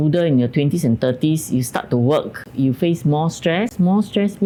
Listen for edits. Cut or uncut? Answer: uncut